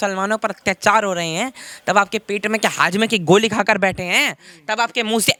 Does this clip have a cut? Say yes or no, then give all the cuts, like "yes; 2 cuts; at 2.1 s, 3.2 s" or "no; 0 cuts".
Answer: no; 0 cuts